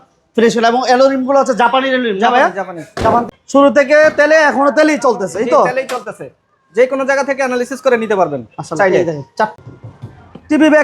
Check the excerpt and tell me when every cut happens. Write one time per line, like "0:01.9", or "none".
0:03.3
0:09.6